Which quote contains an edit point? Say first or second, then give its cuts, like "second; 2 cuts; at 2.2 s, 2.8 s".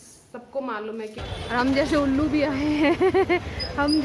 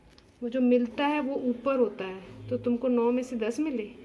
first; 1 cut; at 1.2 s